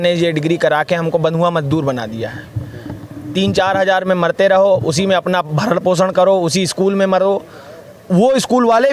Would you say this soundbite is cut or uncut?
uncut